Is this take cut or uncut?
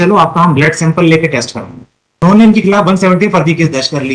cut